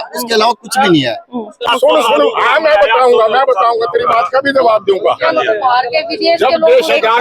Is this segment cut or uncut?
cut